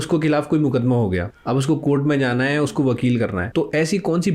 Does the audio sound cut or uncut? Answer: cut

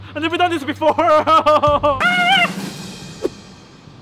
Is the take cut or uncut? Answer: cut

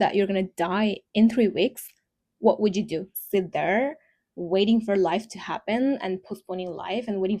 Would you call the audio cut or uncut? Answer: cut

